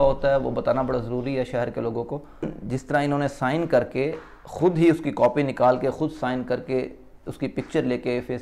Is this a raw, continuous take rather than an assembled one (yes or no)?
no